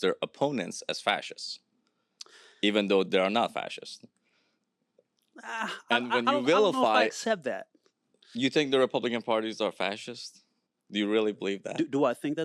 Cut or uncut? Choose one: uncut